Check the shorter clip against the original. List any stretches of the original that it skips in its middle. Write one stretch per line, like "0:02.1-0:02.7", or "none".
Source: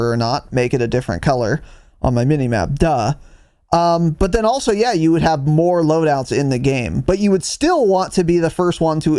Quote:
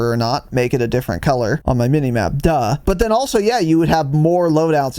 0:01.6-0:02.0
0:03.2-0:04.2